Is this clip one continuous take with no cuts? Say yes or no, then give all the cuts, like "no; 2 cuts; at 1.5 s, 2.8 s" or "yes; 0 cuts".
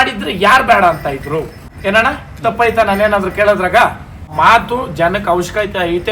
no; 2 cuts; at 1.6 s, 4.3 s